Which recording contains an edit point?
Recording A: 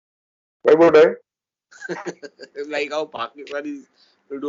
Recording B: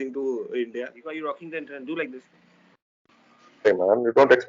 B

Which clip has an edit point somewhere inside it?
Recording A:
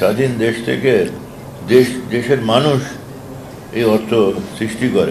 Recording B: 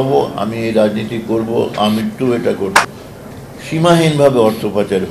B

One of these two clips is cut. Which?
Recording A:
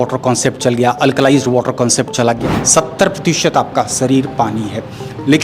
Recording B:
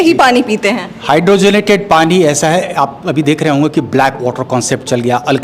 A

